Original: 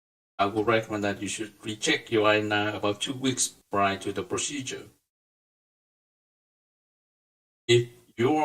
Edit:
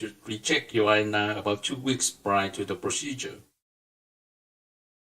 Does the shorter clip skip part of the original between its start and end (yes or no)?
yes